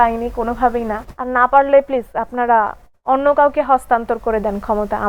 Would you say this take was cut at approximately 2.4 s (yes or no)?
no